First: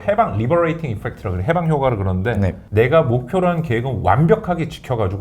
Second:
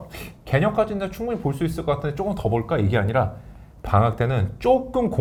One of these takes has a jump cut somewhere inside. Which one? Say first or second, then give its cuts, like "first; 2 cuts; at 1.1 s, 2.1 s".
first; 1 cut; at 2.6 s